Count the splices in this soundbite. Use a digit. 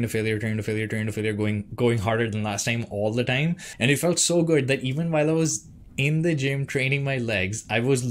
1